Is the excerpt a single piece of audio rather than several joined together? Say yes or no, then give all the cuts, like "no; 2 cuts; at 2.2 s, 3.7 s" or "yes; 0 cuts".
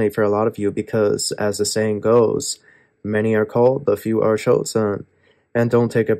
yes; 0 cuts